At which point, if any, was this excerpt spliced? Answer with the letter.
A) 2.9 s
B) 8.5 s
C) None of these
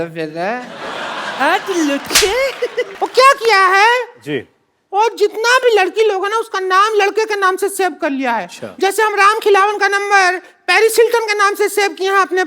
A